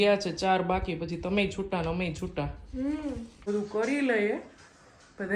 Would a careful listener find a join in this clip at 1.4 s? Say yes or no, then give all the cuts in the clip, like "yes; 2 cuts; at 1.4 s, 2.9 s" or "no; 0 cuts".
no; 1 cut; at 3.4 s